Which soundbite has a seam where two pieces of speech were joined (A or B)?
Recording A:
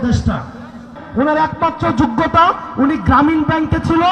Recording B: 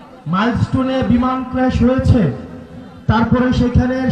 A